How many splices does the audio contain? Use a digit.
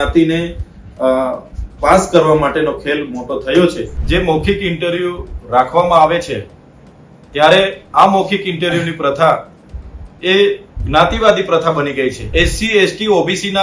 2